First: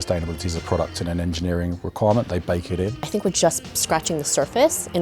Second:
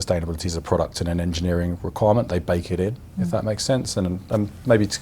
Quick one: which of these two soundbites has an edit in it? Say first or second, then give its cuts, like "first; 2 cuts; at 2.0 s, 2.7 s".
first; 1 cut; at 3.0 s